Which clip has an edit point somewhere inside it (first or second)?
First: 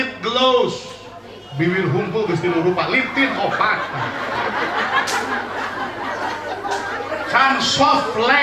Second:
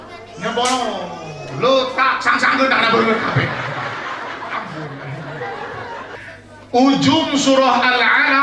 second